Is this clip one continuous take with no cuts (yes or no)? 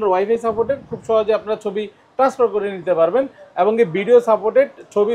yes